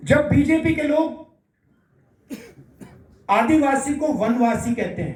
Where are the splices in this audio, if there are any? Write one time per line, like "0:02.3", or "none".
none

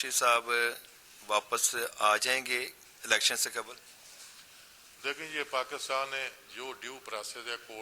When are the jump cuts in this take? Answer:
none

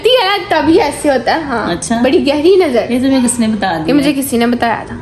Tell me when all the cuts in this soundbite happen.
none

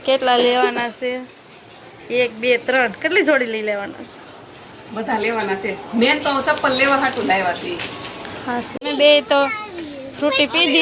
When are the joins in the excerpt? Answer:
0:08.8

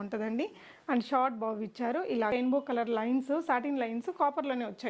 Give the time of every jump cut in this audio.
0:02.3

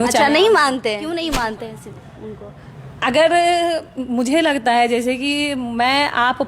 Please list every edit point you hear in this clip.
0:01.0

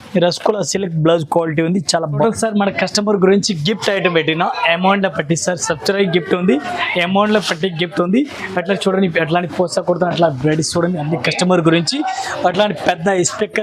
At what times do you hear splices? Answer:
0:02.2

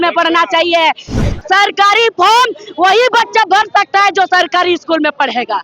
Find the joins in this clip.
0:01.2

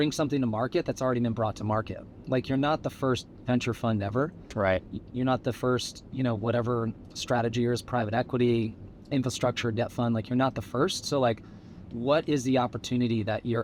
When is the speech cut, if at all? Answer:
none

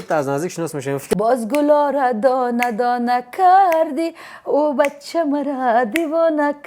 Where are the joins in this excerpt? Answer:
0:01.0

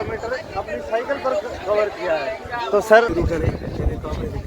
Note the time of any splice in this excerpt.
0:03.1

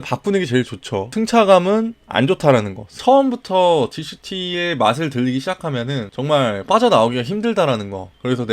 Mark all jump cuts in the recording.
0:02.8

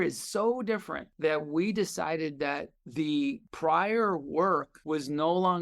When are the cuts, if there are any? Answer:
0:01.0
0:03.5
0:04.7

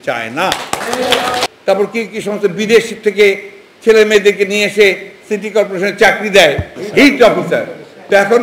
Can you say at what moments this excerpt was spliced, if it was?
0:01.4
0:06.8

